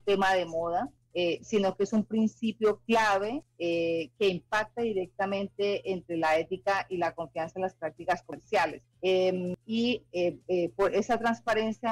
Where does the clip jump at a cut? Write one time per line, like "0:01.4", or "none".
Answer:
0:01.0
0:03.5
0:08.4
0:09.6

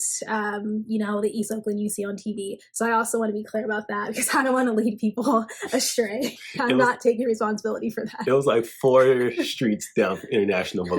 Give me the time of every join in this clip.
none

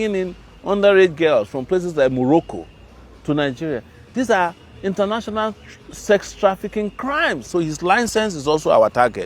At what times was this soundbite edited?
0:07.5

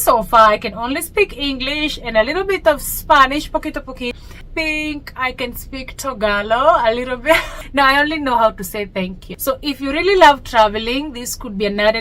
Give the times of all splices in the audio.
0:04.1
0:09.3

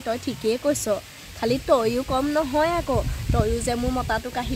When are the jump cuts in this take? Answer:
none

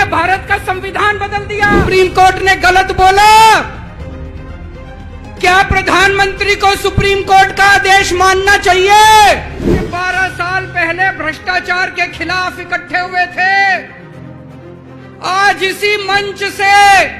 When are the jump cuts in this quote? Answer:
0:01.8
0:09.7

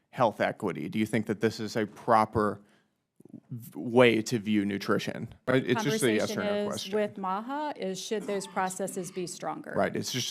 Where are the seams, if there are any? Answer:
0:05.5

